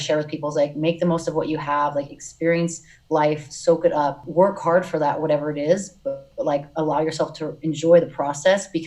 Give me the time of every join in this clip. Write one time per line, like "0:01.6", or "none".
0:04.2